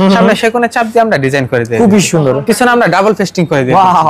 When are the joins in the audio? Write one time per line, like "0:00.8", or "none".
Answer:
none